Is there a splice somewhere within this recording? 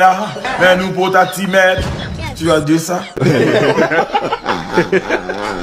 no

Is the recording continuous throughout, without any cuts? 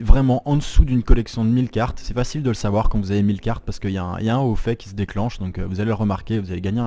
yes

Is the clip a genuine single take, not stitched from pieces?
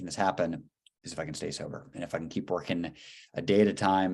yes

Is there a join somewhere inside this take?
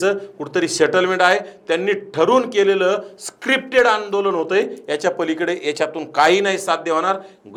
no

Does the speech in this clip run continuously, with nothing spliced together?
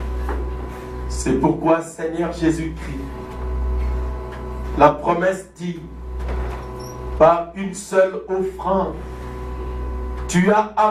yes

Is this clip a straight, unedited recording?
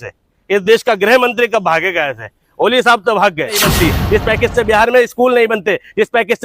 no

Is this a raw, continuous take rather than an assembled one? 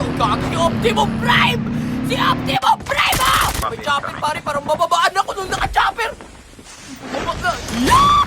no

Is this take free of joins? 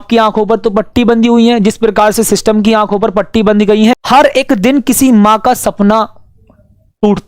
no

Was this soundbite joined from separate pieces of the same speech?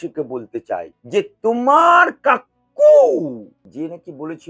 yes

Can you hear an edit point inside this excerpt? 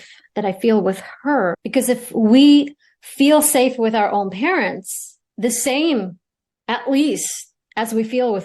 yes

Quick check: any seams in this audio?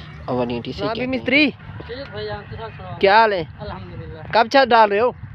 yes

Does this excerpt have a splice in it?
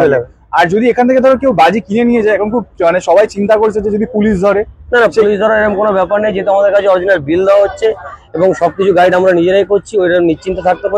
no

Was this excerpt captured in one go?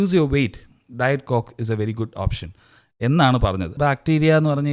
no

